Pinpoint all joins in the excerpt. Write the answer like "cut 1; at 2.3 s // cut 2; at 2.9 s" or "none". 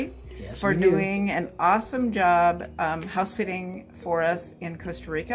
none